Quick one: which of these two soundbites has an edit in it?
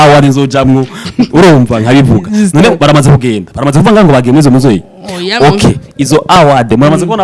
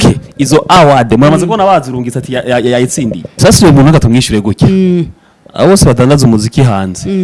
second; 1 cut; at 3.3 s

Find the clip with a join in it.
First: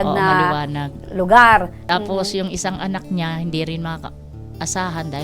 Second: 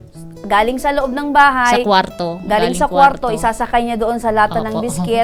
first; 1 cut; at 1.8 s

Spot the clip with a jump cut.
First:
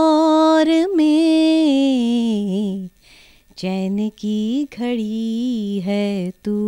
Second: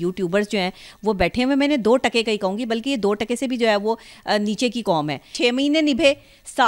second; 1 cut; at 5.3 s

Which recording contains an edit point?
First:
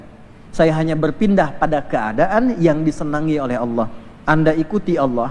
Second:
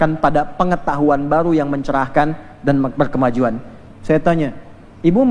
second; 1 cut; at 3.8 s

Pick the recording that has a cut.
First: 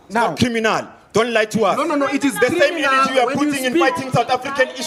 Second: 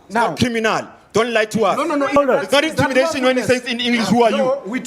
second; 1 cut; at 2.2 s

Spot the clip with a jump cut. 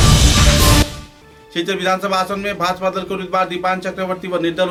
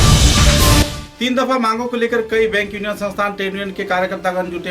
second; 1 cut; at 1.0 s

